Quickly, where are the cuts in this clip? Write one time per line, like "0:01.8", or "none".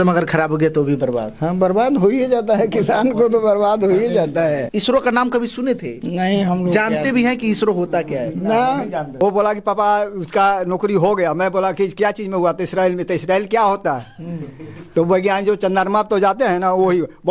0:04.7
0:09.1